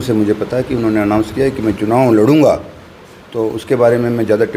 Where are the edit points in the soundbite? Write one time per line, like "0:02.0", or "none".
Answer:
none